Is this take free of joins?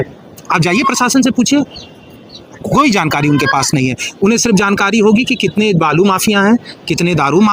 yes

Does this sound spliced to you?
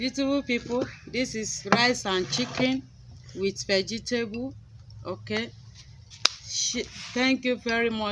no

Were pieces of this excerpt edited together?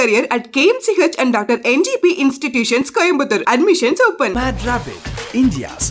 no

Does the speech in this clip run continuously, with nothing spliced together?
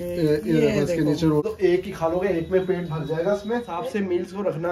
no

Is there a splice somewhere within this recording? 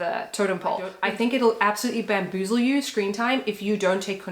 yes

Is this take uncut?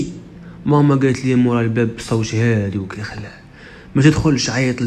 yes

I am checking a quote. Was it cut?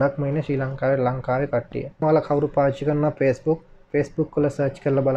yes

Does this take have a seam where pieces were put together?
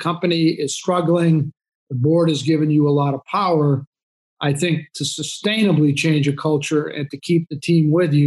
no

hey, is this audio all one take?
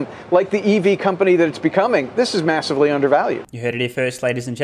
yes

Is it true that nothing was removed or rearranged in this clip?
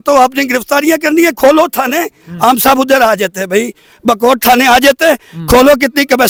yes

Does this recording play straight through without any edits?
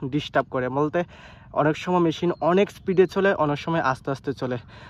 yes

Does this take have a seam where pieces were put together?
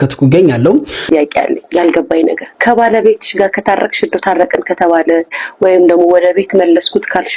yes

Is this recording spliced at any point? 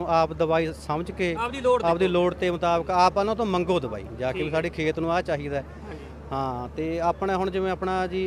no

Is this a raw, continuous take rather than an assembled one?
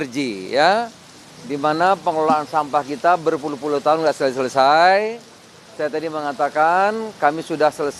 yes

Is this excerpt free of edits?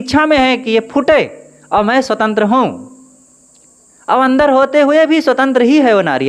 yes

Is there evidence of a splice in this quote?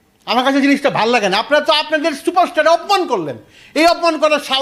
no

